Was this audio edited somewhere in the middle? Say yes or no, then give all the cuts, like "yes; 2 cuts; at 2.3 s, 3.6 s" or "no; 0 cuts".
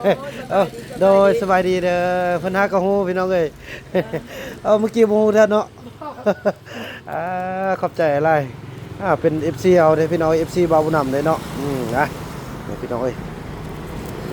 no; 0 cuts